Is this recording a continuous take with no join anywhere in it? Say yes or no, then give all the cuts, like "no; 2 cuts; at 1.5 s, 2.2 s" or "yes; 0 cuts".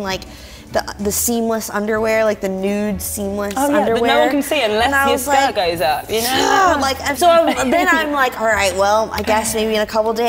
no; 1 cut; at 7.1 s